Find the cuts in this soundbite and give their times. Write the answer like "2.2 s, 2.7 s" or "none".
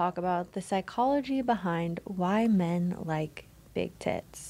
none

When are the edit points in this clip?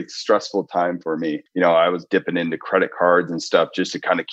none

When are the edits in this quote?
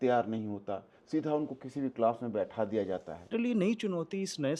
3.3 s

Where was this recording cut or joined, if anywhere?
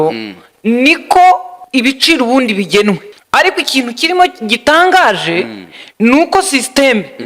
1.5 s, 3.1 s

